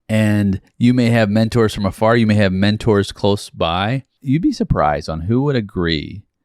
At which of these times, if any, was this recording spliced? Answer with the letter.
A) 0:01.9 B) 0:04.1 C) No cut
B